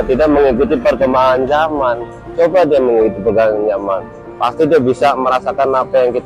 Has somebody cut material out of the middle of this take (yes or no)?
no